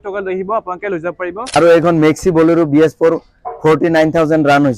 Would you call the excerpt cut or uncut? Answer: cut